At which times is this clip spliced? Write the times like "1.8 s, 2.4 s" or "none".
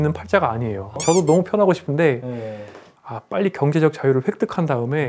1.0 s, 3.0 s